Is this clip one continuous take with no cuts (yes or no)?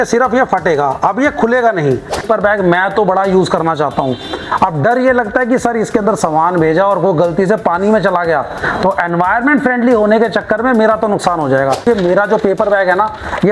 no